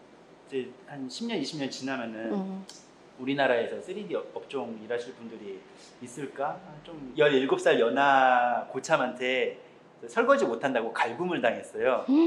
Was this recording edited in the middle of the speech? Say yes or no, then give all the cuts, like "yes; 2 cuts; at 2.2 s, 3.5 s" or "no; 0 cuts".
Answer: yes; 1 cut; at 7.0 s